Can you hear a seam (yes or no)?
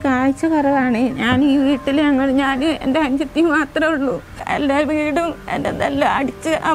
yes